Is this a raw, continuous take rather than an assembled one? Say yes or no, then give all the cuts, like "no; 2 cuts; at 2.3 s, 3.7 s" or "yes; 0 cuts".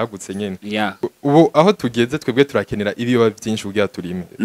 no; 1 cut; at 1.0 s